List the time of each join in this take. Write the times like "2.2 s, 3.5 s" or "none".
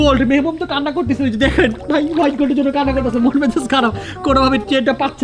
none